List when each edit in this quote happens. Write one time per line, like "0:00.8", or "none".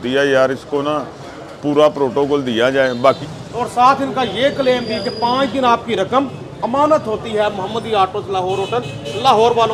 0:03.2